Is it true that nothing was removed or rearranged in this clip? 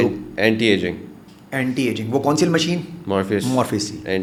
yes; 0 cuts

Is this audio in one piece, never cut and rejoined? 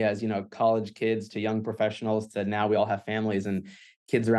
yes; 0 cuts

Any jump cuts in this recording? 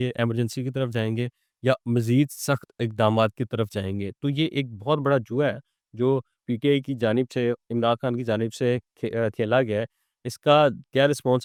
no; 0 cuts

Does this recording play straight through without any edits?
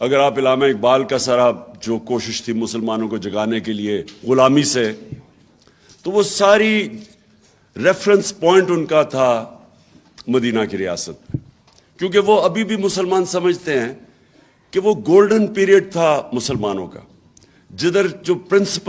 yes; 0 cuts

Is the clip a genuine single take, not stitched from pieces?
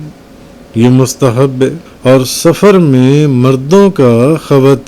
no; 1 cut; at 1.9 s

